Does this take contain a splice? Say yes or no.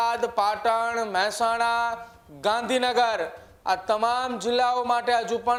no